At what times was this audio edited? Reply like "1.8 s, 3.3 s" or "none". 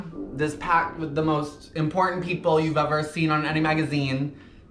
none